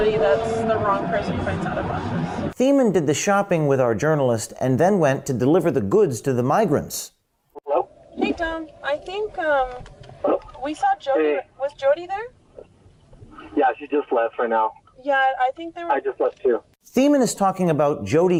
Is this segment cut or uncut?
uncut